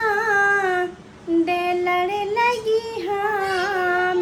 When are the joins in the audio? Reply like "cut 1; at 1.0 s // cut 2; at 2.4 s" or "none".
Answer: none

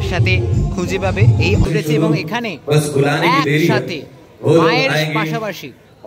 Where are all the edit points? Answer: cut 1; at 1.7 s

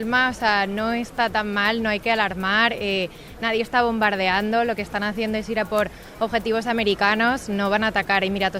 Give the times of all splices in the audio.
none

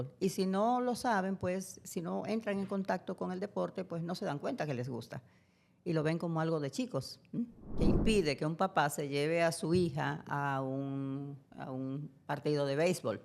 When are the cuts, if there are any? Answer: cut 1; at 7.6 s

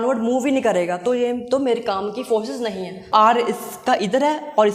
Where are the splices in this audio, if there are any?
cut 1; at 3.1 s

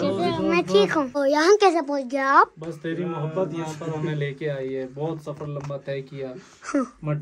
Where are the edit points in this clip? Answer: cut 1; at 1.1 s

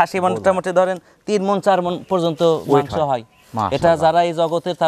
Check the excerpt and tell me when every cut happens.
none

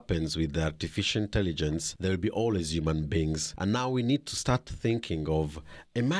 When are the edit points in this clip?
cut 1; at 1.9 s // cut 2; at 3.5 s

